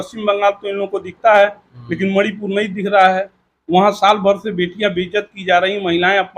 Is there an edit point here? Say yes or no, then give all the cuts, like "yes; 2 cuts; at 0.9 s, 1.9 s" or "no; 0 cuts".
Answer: no; 0 cuts